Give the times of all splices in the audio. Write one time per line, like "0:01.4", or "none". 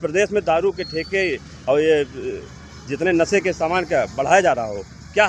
none